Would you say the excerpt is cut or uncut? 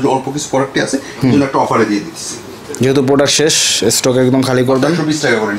uncut